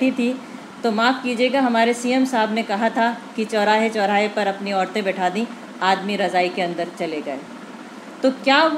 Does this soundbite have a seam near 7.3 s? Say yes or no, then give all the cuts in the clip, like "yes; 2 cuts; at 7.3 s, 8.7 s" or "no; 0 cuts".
no; 0 cuts